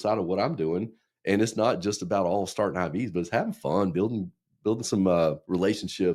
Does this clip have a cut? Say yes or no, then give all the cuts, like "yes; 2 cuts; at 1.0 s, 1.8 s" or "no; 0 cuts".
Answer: no; 0 cuts